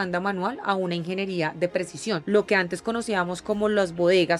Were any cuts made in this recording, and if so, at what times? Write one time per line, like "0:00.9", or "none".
0:02.2